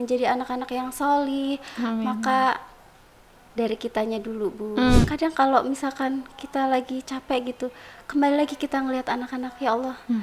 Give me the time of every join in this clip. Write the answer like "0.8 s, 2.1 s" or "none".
5.1 s